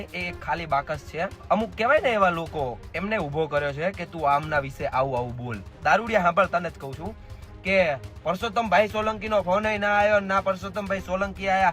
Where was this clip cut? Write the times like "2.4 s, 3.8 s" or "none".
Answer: 1.4 s, 5.7 s